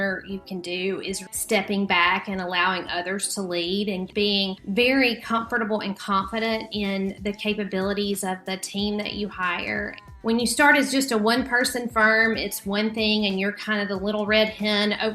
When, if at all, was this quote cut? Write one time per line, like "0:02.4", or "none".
0:01.2
0:04.3
0:10.0